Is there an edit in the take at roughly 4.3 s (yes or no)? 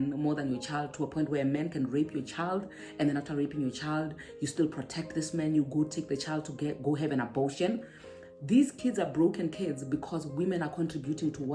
no